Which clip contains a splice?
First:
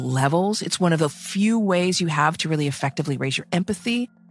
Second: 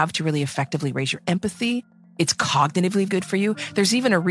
second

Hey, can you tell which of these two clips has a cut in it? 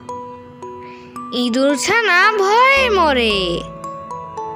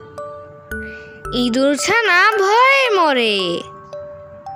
first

